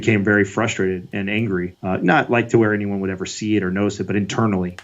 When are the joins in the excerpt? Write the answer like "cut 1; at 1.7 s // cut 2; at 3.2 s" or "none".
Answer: cut 1; at 1.7 s